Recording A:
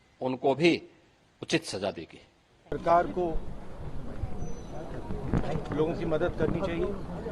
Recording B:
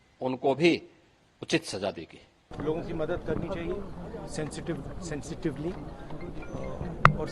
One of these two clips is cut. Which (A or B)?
B